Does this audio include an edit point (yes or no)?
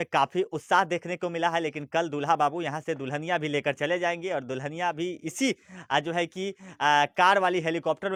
no